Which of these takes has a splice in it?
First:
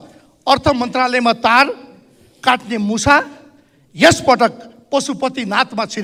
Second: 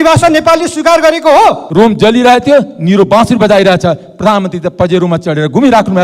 second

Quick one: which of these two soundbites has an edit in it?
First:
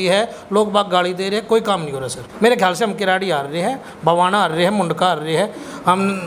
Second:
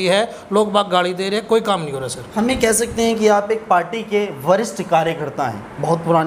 first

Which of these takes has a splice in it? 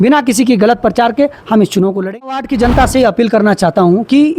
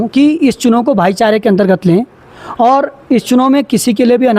first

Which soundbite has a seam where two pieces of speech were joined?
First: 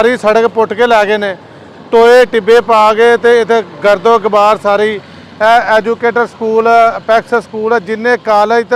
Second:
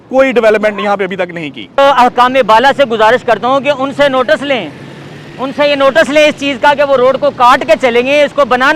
second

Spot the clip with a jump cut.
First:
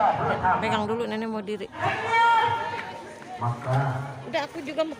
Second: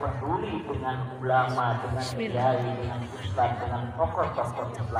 first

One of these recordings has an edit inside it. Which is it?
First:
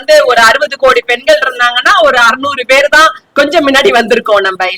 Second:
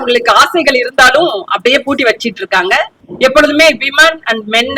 second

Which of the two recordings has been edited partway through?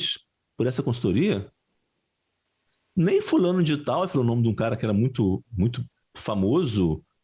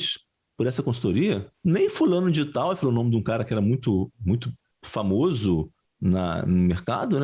second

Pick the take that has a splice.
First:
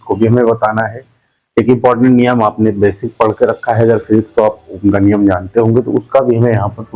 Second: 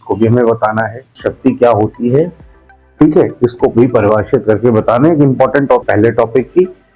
second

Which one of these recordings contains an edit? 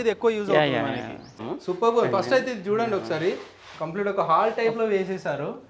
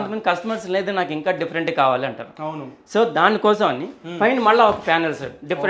first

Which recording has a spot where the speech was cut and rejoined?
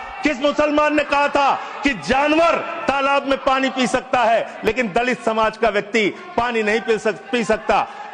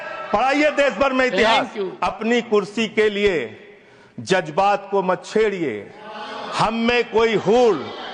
second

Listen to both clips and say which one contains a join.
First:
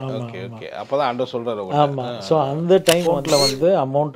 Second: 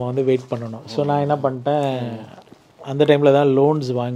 first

